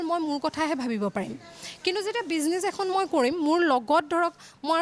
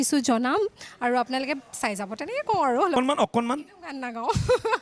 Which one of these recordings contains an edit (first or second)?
second